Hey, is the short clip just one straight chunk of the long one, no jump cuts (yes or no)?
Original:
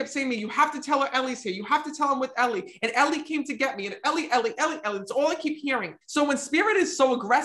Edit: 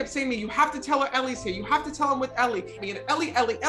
no